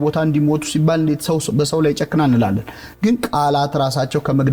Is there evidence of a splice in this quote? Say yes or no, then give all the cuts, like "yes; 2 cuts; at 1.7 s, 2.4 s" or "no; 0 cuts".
no; 0 cuts